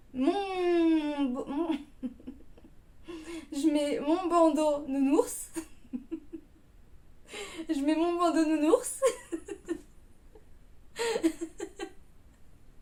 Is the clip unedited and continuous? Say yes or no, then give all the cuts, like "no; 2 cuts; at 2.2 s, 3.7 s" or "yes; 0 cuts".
yes; 0 cuts